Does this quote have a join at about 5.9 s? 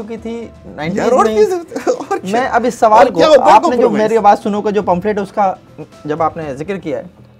no; 0 cuts

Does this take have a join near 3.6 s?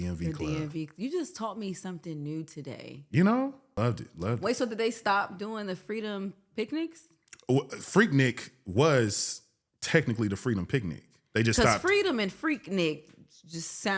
yes; 1 cut; at 3.6 s

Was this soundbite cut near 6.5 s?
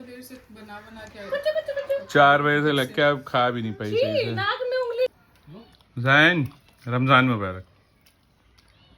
no; 1 cut; at 5.1 s

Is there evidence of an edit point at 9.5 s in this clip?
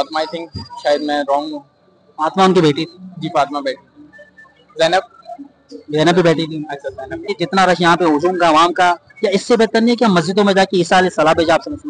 no; 1 cut; at 7.3 s

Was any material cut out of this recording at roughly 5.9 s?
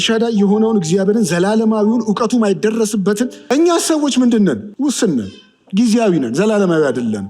no; 2 cuts; at 3.4 s, 4.7 s

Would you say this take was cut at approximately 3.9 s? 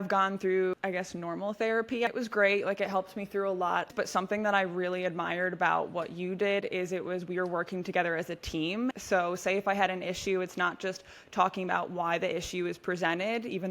yes; 4 cuts; at 0.7 s, 2.1 s, 3.9 s, 9.0 s

